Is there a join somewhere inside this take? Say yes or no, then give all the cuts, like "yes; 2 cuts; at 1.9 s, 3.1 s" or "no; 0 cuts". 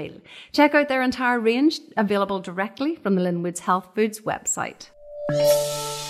yes; 1 cut; at 5.2 s